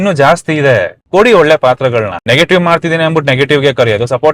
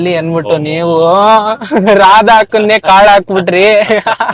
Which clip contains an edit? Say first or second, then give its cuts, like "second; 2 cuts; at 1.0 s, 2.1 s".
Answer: first; 2 cuts; at 1.0 s, 2.2 s